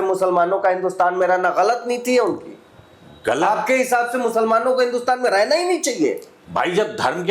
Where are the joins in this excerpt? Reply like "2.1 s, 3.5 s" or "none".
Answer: none